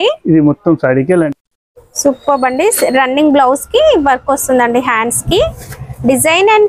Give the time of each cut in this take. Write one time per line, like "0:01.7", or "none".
0:01.3